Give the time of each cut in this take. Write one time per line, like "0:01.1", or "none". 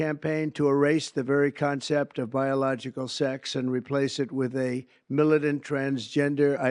none